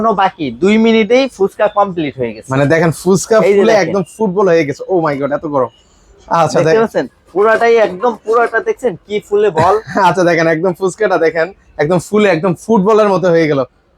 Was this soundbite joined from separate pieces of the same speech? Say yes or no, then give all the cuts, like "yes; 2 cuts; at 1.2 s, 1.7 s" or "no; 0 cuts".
no; 0 cuts